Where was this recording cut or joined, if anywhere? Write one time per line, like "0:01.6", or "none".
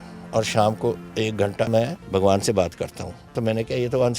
0:01.7
0:03.3